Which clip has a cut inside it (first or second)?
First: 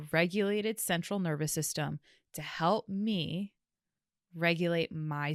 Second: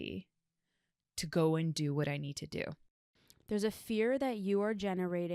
second